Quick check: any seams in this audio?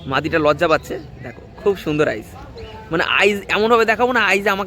no; 0 cuts

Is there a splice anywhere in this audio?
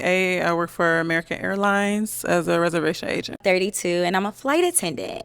yes; 1 cut; at 3.4 s

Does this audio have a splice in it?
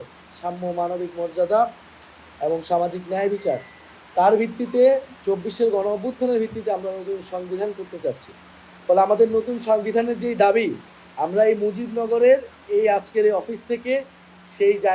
no; 0 cuts

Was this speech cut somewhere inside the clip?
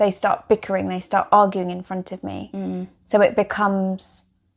no; 0 cuts

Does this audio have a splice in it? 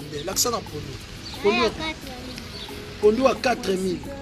no; 0 cuts

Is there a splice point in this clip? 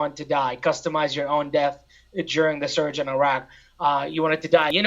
no; 0 cuts

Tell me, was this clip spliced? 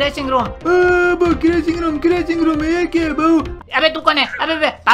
yes; 1 cut; at 3.5 s

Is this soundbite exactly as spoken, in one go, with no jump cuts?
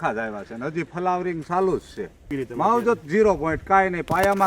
no; 1 cut; at 2.4 s

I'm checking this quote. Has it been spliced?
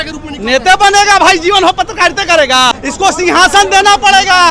yes; 1 cut; at 2.7 s

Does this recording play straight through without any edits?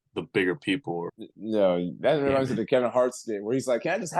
no; 1 cut; at 1.1 s

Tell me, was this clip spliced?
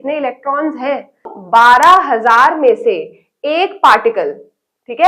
yes; 1 cut; at 1.4 s

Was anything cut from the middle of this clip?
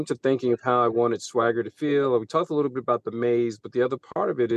no; 0 cuts

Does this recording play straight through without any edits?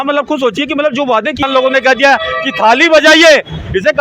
no; 1 cut; at 1.4 s

